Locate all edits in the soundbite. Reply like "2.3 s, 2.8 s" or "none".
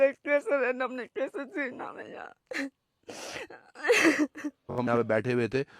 4.9 s